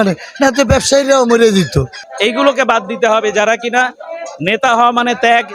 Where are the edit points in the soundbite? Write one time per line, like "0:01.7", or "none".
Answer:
0:02.0